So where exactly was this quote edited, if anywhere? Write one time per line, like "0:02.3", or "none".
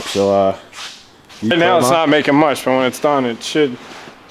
0:01.5